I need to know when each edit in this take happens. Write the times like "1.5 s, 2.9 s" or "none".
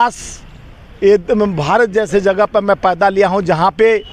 none